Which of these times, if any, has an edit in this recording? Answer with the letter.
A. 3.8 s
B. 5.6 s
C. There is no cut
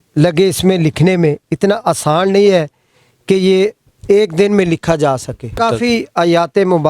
B